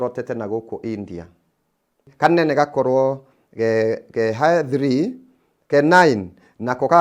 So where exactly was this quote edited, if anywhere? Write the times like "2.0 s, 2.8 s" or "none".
2.1 s

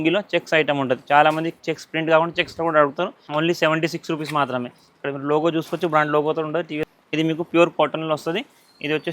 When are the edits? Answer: 3.2 s, 6.9 s

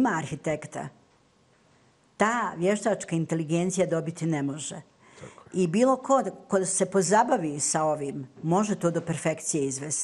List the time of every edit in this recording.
none

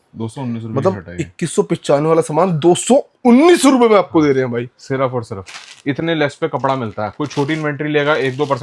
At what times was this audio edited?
none

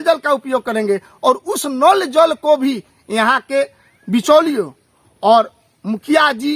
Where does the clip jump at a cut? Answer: none

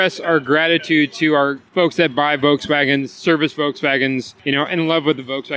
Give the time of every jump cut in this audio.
1.6 s, 4.3 s

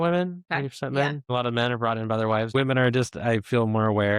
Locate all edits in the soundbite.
1.2 s, 2.5 s

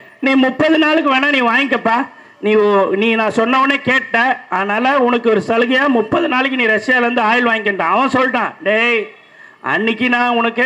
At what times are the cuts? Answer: none

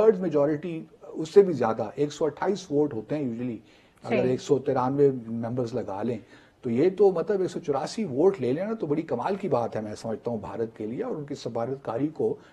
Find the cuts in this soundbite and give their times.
none

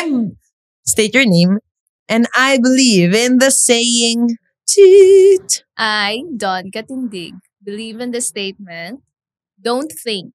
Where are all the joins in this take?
none

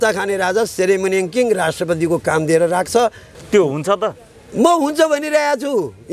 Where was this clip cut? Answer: 3.3 s

